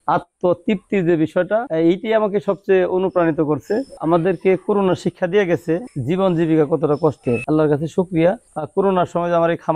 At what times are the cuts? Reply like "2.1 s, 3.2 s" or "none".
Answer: 3.9 s, 5.9 s, 7.4 s, 8.5 s

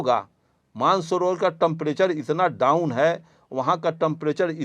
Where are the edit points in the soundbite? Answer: none

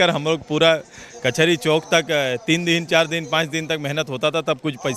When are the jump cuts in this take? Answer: none

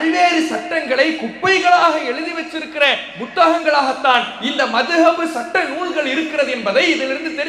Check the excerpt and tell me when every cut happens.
none

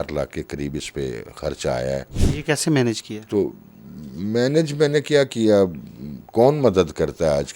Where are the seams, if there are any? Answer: none

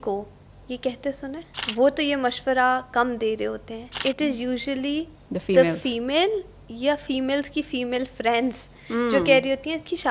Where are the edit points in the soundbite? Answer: 1.5 s, 4.0 s

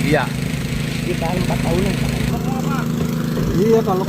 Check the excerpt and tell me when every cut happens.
2.3 s

